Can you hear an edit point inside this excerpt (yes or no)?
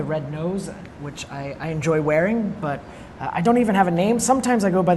yes